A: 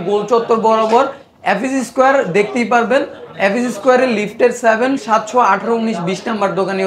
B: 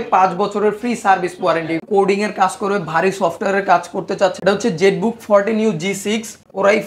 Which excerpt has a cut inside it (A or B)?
B